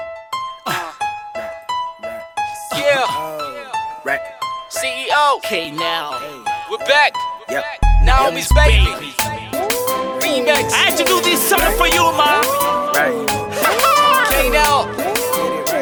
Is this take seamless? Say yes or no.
yes